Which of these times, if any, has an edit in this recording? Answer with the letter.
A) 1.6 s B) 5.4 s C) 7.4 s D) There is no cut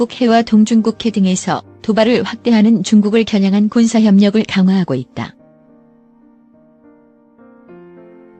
B